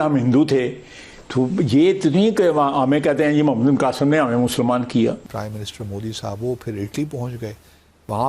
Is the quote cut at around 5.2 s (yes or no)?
yes